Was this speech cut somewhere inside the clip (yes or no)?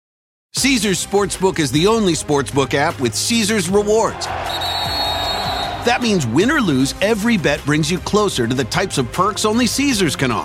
no